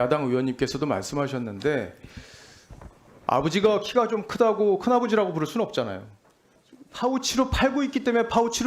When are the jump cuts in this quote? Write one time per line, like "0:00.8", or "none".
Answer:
0:06.5